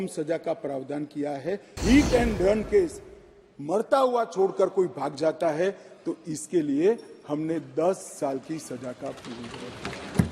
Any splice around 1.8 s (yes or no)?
yes